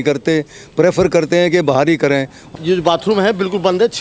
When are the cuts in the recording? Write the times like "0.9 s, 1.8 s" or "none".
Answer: 2.4 s